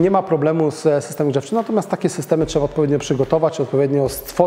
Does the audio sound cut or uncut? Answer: uncut